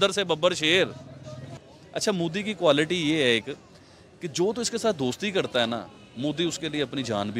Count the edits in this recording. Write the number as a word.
one